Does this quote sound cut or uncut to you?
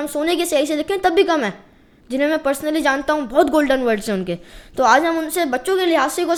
uncut